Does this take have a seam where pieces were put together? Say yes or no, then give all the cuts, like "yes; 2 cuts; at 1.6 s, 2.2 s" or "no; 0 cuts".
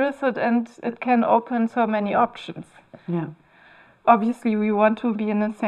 no; 0 cuts